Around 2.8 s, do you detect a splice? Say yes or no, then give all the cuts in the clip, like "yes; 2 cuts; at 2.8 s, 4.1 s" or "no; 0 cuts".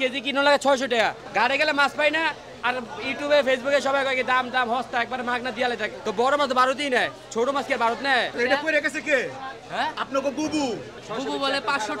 no; 4 cuts; at 1.2 s, 5.9 s, 8.3 s, 10.9 s